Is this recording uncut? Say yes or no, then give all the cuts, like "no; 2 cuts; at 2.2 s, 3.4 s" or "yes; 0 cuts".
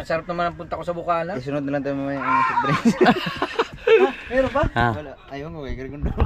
yes; 0 cuts